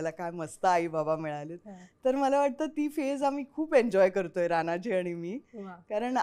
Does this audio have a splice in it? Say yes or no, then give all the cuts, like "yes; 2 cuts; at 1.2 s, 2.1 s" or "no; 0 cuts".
no; 0 cuts